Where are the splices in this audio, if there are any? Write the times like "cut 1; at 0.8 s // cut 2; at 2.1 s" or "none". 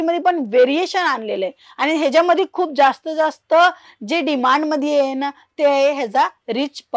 none